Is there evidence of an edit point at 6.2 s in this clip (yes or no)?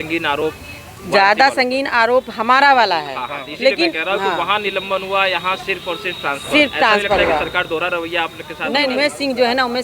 no